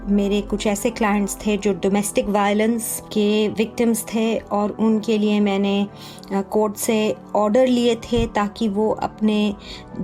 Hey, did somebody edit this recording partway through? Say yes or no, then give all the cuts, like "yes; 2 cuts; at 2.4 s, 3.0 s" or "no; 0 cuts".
yes; 1 cut; at 3.0 s